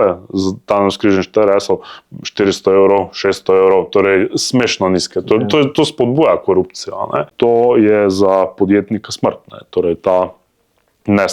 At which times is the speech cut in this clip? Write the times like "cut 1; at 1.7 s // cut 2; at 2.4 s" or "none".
cut 1; at 7.3 s